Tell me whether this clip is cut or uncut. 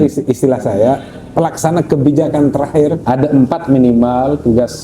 cut